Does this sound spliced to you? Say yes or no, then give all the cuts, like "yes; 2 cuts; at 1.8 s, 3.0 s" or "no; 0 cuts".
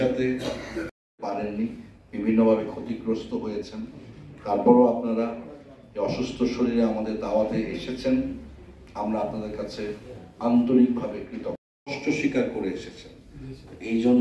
no; 0 cuts